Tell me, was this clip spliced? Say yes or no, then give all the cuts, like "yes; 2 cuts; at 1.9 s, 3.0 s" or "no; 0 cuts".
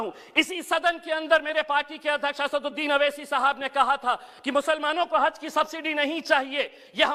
no; 0 cuts